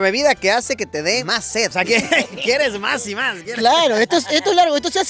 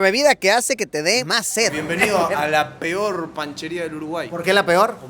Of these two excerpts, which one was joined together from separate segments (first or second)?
second